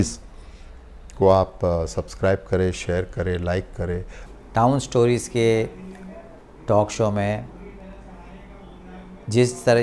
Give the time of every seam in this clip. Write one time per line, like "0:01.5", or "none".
0:04.2